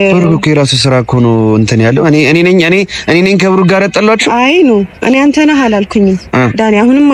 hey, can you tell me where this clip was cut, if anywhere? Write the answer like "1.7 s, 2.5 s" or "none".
none